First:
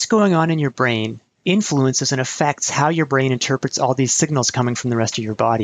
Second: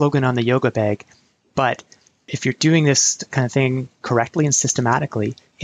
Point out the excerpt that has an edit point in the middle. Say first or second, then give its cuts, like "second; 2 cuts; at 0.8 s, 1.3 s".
second; 1 cut; at 2.3 s